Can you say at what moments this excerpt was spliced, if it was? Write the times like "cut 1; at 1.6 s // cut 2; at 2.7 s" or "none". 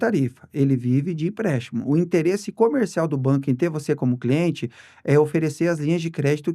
none

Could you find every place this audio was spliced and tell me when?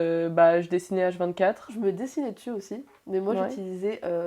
cut 1; at 1.7 s

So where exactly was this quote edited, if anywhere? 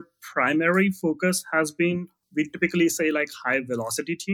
cut 1; at 2.2 s

